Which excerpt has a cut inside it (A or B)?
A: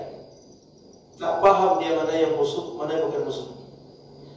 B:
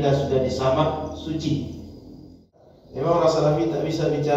B